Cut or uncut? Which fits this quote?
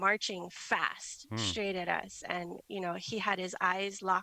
uncut